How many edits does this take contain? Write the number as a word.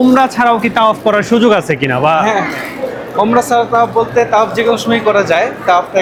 zero